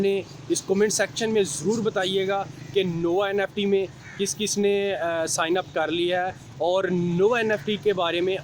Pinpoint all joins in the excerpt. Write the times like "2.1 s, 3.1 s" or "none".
none